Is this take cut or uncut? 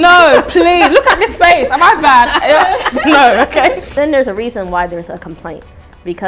cut